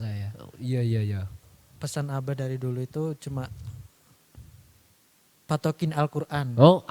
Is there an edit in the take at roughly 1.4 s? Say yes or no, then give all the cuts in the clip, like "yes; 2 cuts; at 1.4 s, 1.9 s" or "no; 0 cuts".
yes; 1 cut; at 1.4 s